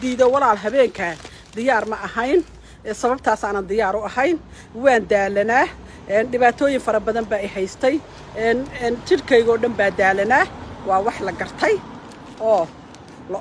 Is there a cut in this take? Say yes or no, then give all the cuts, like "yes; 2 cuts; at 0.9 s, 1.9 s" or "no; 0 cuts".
no; 0 cuts